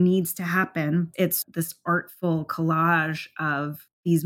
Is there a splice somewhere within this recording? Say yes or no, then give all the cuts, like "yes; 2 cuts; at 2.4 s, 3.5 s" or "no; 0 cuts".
yes; 1 cut; at 1.2 s